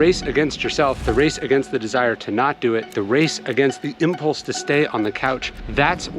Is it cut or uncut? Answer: cut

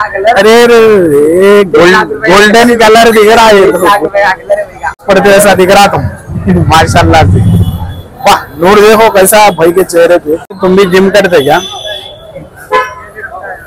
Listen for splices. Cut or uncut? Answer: cut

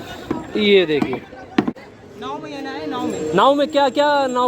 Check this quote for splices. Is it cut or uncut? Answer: cut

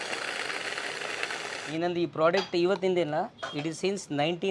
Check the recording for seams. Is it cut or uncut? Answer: cut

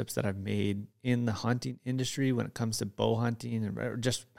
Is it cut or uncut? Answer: uncut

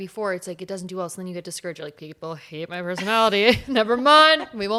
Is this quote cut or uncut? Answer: uncut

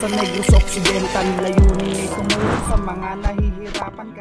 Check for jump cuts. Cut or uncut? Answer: uncut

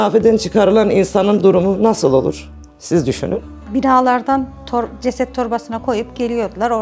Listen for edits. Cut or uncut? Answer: uncut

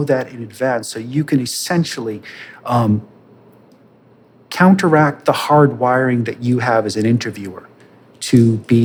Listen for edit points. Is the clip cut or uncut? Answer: uncut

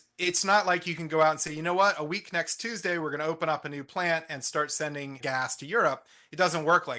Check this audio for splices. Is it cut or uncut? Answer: cut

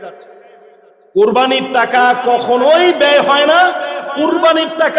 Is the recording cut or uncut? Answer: uncut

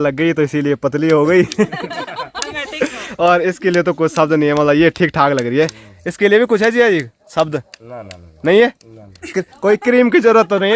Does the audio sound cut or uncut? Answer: uncut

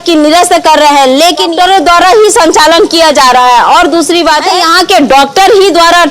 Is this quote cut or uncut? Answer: cut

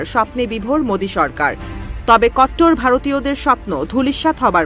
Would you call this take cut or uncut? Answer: cut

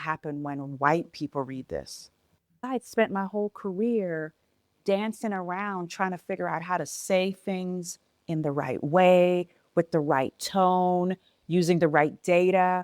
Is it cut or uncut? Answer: cut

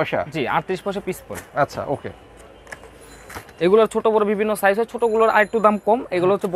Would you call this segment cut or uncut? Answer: uncut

